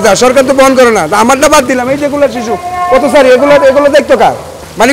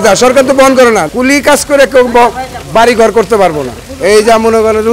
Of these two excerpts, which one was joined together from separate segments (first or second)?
second